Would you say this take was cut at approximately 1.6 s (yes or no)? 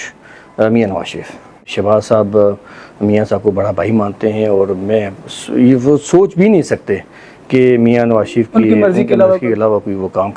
yes